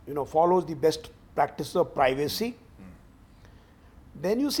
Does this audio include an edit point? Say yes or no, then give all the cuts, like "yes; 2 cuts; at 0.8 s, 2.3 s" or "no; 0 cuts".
no; 0 cuts